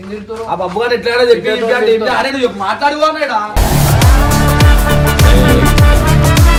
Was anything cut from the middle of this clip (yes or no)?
no